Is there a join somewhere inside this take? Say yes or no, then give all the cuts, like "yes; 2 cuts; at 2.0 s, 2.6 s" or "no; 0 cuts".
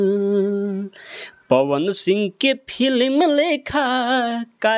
no; 0 cuts